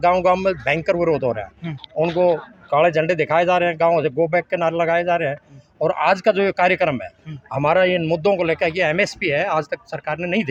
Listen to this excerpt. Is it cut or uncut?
uncut